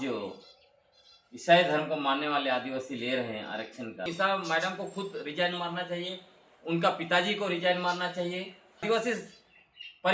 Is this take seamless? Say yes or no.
no